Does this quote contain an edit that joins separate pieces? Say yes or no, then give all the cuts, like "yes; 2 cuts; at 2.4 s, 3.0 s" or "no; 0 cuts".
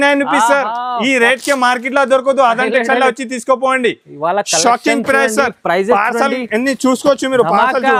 no; 0 cuts